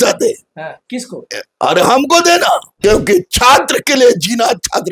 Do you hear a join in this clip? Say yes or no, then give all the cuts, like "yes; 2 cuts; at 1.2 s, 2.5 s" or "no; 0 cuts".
yes; 1 cut; at 2.7 s